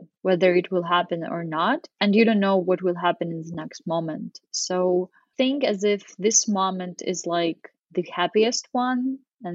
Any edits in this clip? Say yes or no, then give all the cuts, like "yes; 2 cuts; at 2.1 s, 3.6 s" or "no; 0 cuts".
yes; 1 cut; at 5.2 s